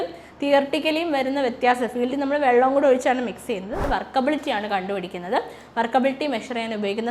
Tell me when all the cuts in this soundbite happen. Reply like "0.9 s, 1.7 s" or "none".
3.8 s